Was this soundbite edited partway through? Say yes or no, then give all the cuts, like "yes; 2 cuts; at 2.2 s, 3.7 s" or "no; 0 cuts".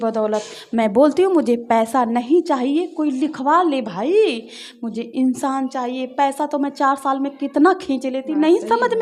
no; 0 cuts